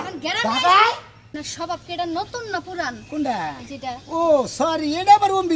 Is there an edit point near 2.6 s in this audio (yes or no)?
no